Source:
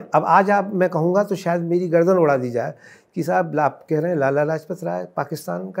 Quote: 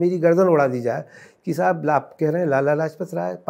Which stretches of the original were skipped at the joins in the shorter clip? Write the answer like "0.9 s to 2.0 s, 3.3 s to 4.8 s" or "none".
none